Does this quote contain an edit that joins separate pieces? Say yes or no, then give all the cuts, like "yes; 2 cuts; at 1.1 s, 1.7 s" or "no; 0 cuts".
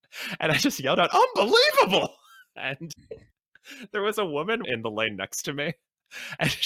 yes; 1 cut; at 4.6 s